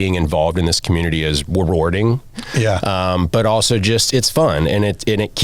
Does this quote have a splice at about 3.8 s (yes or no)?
no